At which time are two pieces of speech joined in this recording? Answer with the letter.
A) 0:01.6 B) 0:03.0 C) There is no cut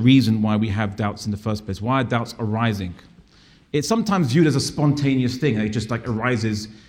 C